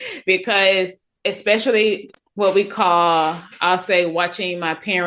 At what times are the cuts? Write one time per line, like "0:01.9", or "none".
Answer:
0:02.1